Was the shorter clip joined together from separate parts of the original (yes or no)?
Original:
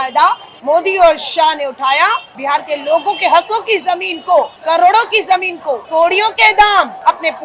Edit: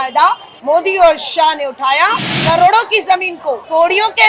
yes